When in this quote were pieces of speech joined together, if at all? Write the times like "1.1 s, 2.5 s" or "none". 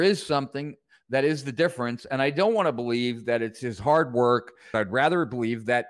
4.6 s

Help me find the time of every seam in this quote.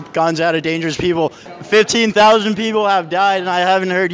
1.5 s

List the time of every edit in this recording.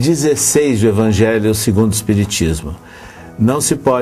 1.4 s

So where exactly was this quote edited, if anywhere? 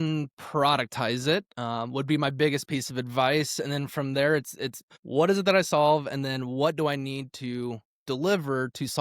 4.9 s

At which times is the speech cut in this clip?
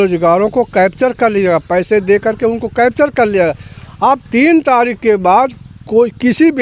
none

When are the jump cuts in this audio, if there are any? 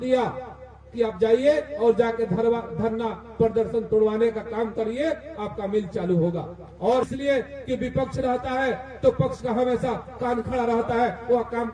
7.1 s

